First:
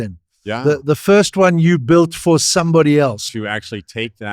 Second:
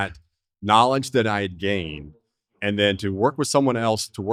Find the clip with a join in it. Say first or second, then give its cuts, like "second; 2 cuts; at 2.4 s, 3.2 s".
first; 1 cut; at 3.3 s